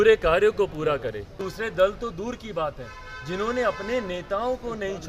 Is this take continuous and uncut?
no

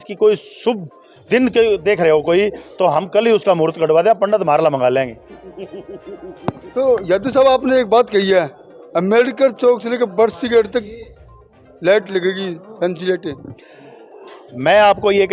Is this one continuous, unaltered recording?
yes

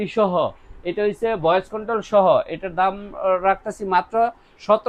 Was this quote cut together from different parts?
no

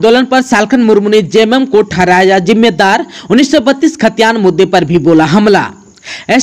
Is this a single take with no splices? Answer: yes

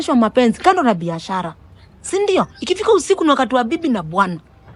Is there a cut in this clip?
no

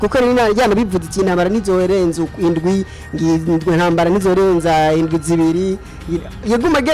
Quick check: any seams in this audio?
no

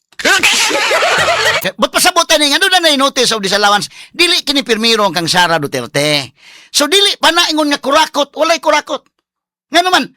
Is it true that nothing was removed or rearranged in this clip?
no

